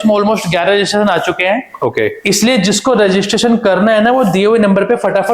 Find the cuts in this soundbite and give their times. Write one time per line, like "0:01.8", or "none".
none